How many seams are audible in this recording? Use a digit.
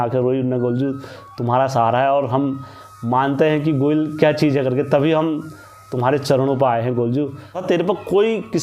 1